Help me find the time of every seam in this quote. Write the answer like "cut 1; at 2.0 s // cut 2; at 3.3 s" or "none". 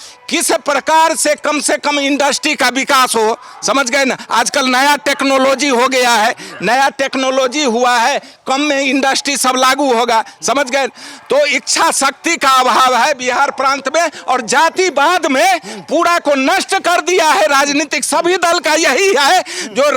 none